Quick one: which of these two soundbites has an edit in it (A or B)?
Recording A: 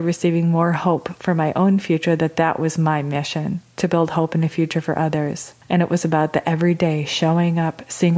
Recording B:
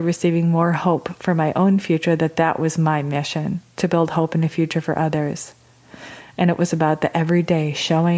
A